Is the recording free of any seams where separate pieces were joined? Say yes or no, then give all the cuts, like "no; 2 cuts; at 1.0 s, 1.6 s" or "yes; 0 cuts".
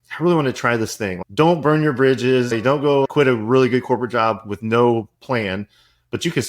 no; 2 cuts; at 1.2 s, 2.9 s